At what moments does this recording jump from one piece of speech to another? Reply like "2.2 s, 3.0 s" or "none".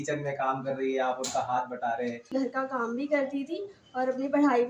2.2 s